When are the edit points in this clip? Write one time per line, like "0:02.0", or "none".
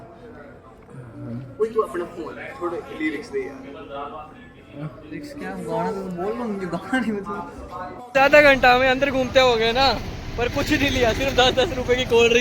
0:08.0